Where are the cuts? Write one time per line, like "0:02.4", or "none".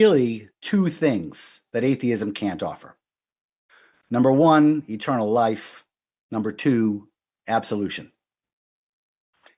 none